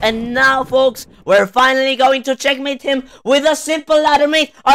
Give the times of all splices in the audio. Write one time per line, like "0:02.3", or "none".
none